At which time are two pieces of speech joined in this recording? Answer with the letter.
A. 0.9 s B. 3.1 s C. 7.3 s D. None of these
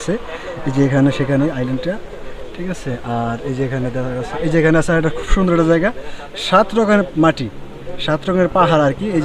D